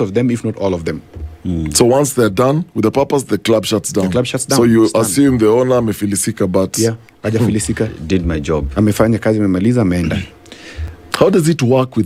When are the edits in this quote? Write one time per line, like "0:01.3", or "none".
none